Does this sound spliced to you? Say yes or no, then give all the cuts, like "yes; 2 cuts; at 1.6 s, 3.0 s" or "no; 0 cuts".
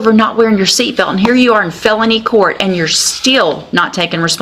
no; 0 cuts